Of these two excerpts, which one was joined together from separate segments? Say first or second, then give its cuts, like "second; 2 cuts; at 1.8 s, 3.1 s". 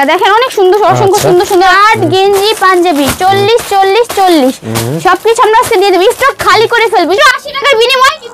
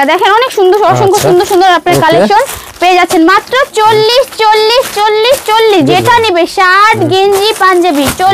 first; 2 cuts; at 1.7 s, 7.2 s